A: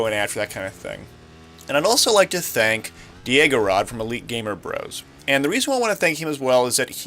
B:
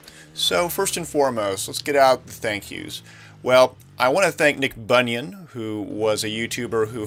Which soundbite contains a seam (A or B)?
A